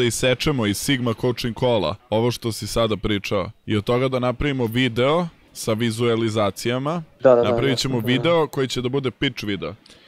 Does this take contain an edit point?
yes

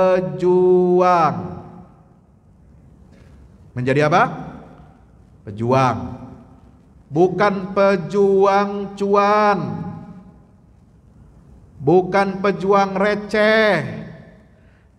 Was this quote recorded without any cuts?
yes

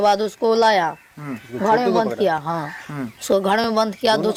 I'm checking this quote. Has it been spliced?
no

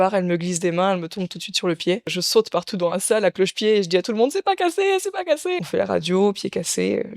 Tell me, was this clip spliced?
yes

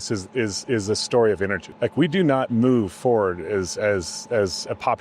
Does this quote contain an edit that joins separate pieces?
yes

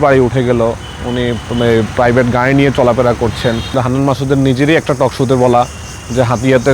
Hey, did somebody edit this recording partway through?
yes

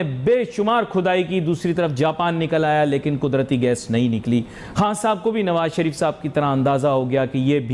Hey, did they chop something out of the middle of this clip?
no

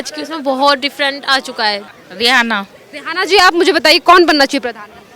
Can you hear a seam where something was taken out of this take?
yes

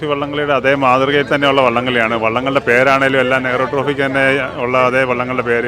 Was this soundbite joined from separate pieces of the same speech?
no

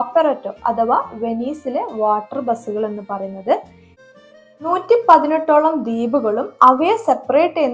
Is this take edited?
yes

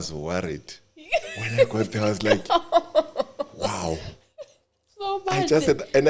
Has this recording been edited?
no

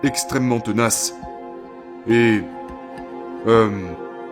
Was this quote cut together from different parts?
no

